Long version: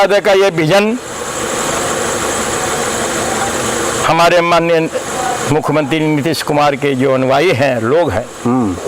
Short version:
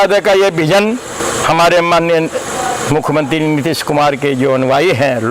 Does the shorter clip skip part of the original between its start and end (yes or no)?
yes